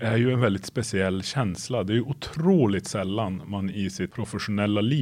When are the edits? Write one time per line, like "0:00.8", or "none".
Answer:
none